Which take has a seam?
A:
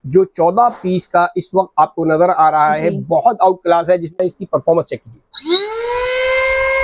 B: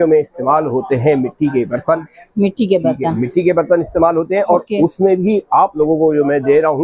A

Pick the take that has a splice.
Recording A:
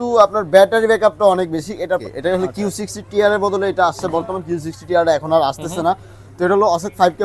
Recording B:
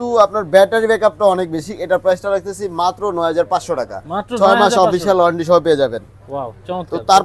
A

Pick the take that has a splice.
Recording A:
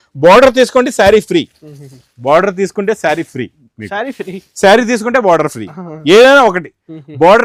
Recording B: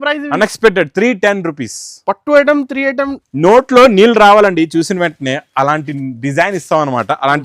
B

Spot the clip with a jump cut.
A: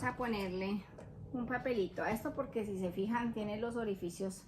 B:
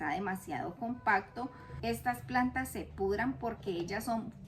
B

